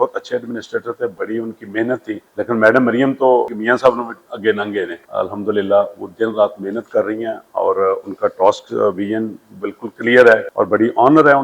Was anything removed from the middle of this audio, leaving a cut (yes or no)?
yes